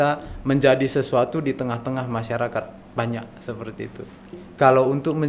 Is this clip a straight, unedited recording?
no; 1 cut; at 4.3 s

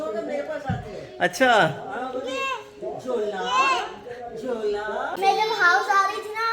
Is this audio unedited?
no; 1 cut; at 5.1 s

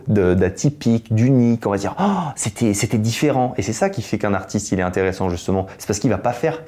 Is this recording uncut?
yes; 0 cuts

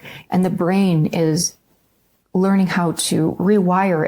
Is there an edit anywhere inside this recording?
no; 0 cuts

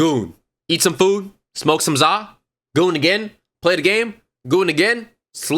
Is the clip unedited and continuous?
yes; 0 cuts

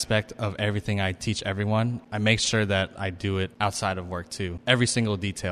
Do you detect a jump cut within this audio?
yes; 3 cuts; at 2.0 s, 3.5 s, 4.6 s

